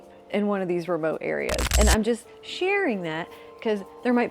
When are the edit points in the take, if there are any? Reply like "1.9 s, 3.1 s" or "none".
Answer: 1.7 s